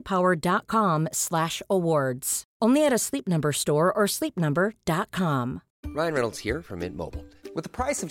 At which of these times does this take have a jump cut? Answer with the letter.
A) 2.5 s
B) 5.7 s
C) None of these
B